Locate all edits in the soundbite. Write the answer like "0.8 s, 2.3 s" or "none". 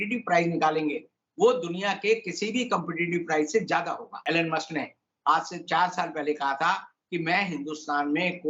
4.1 s